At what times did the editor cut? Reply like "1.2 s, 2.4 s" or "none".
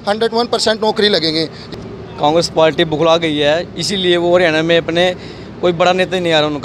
1.7 s